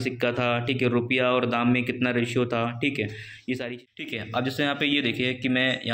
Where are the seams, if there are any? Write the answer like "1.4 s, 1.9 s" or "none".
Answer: 3.7 s